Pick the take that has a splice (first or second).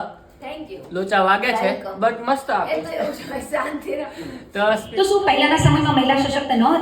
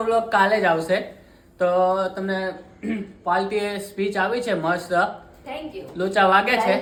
first